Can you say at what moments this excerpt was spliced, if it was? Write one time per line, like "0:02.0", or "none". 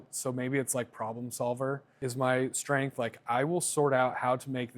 0:01.9